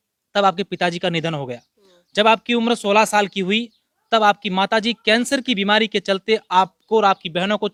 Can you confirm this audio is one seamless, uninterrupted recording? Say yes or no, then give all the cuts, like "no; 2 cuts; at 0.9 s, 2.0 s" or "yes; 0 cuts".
yes; 0 cuts